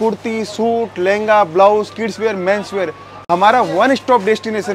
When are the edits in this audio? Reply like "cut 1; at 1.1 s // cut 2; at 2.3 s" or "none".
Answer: none